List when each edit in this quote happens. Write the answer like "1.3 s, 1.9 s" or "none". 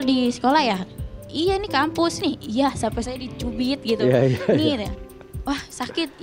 2.2 s